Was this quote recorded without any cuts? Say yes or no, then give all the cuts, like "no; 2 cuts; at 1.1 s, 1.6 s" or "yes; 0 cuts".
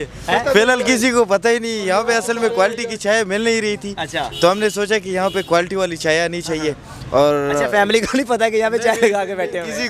yes; 0 cuts